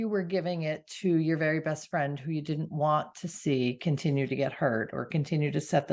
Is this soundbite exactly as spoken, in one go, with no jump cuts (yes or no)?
yes